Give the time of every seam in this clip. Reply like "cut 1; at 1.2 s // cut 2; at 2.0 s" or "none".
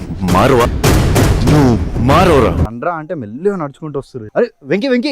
cut 1; at 4.2 s